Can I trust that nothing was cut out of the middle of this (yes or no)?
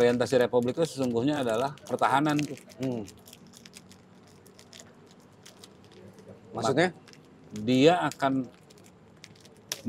yes